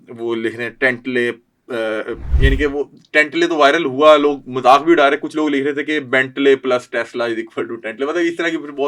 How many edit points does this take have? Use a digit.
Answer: 0